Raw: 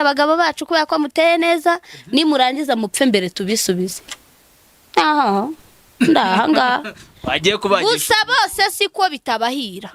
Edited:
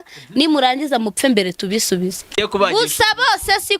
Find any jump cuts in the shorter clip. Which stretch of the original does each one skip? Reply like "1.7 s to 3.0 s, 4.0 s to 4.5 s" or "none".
4.1 s to 7.5 s